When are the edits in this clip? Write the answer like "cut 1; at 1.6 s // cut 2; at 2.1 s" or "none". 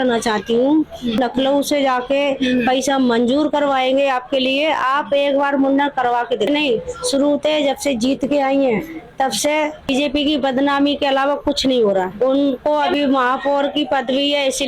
cut 1; at 1.2 s // cut 2; at 6.5 s // cut 3; at 9.9 s // cut 4; at 12.1 s